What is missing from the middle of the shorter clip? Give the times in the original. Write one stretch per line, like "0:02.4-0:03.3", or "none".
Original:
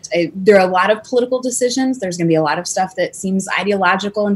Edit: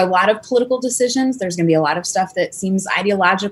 none